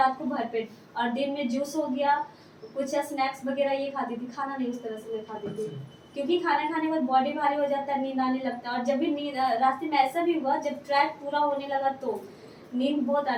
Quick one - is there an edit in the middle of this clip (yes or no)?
no